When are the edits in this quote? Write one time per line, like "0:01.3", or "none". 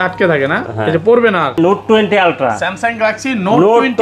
0:01.6